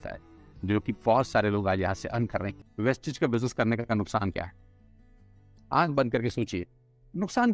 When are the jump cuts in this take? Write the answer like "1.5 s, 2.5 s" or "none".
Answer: 2.5 s